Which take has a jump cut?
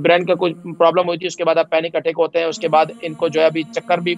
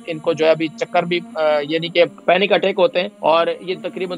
second; 2 cuts; at 2.2 s, 3.1 s

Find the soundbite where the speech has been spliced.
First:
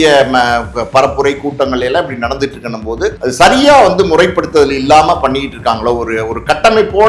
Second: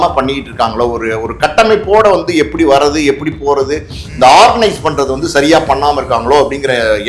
first; 1 cut; at 3.2 s

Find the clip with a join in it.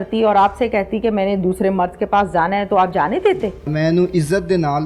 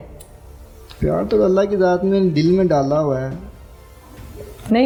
first; 1 cut; at 3.7 s

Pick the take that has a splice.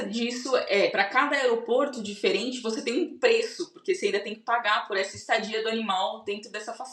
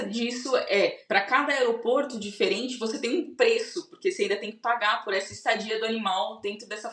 first; 1 cut; at 0.9 s

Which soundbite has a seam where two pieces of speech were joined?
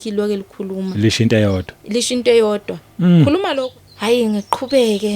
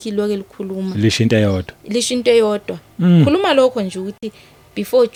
first; 1 cut; at 3.5 s

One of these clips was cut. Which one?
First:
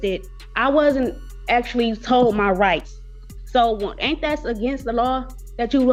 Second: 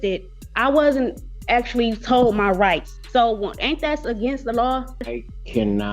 second; 2 cuts; at 2.9 s, 5.0 s

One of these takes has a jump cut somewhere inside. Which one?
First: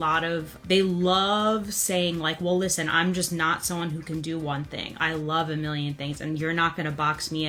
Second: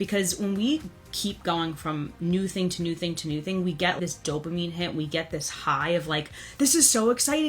second; 1 cut; at 4.0 s

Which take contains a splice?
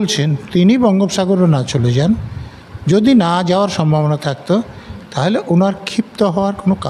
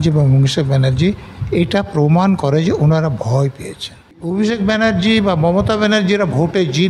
second; 1 cut; at 4.1 s

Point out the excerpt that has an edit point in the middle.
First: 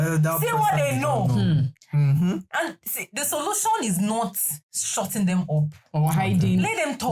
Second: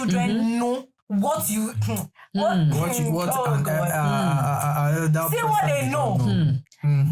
second; 1 cut; at 0.9 s

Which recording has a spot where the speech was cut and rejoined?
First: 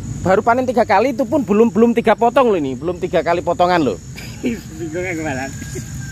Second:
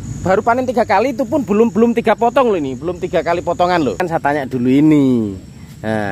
second; 1 cut; at 4.0 s

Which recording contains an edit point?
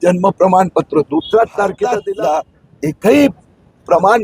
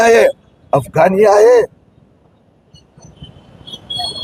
first; 1 cut; at 2.0 s

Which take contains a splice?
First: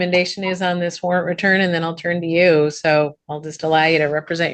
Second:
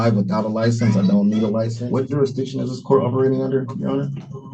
second; 1 cut; at 1.8 s

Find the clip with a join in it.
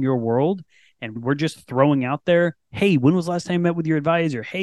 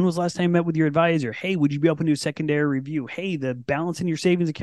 first; 1 cut; at 1.1 s

